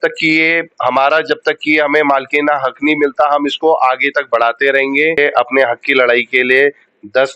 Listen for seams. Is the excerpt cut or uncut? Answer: cut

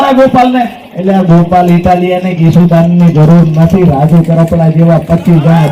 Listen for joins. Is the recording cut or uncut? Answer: uncut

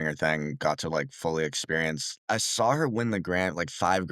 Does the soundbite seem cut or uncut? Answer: cut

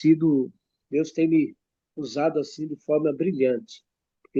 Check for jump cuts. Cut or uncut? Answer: uncut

